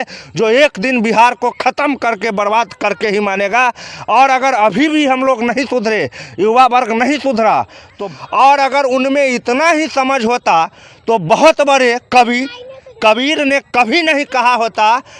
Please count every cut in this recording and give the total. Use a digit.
1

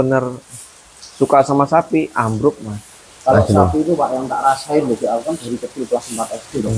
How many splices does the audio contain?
0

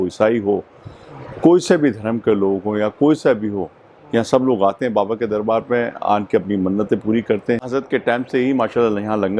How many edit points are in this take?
1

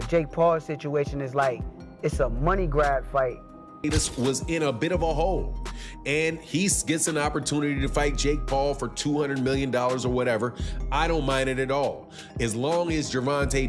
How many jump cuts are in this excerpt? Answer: 1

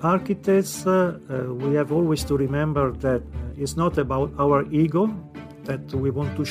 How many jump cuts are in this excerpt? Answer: 1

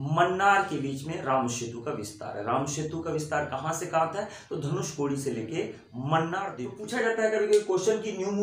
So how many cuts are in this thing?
1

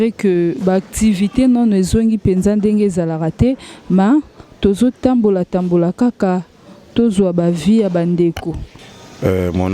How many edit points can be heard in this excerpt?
1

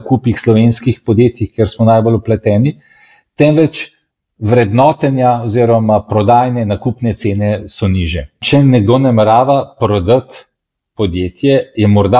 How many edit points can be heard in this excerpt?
1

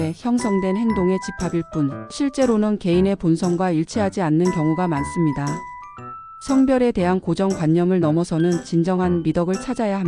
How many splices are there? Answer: 0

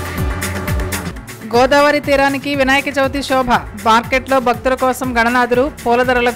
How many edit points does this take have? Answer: 1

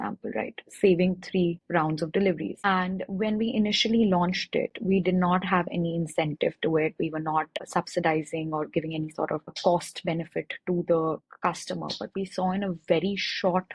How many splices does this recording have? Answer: 4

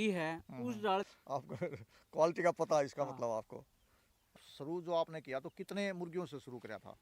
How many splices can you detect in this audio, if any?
2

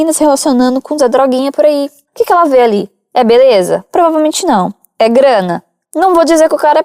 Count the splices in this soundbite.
0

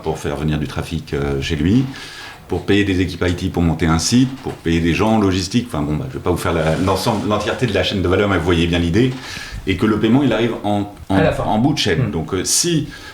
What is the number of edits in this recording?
1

